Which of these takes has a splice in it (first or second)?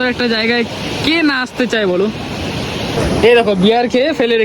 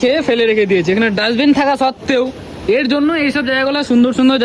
first